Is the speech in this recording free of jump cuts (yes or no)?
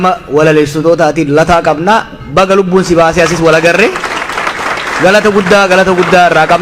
yes